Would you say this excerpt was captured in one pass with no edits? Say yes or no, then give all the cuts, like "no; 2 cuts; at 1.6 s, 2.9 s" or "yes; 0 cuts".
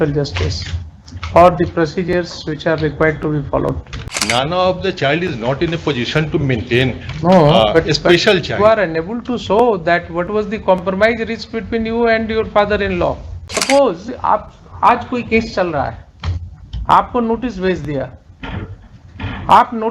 no; 2 cuts; at 4.3 s, 13.6 s